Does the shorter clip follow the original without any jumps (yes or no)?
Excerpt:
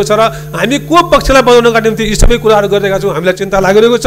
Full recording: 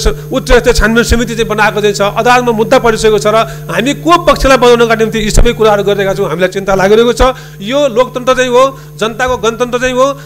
yes